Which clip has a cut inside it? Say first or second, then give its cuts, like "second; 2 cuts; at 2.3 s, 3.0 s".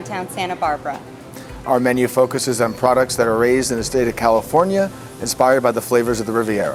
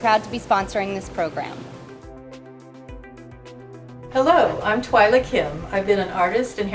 second; 2 cuts; at 1.5 s, 4.1 s